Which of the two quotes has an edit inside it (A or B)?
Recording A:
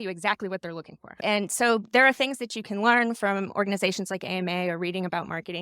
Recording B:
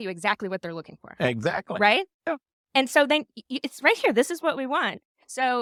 A